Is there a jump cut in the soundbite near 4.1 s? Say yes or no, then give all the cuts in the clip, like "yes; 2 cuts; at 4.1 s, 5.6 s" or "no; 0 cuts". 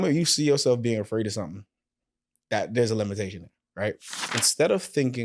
yes; 1 cut; at 4.1 s